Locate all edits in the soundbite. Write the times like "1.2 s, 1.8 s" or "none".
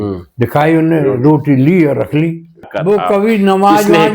2.7 s